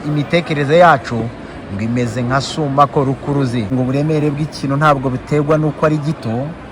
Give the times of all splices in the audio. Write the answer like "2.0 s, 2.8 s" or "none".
3.7 s